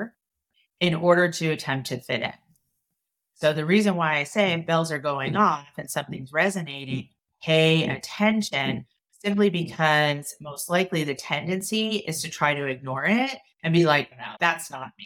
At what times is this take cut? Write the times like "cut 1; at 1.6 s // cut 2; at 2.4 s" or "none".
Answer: none